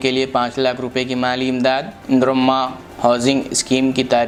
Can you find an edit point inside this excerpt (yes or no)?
no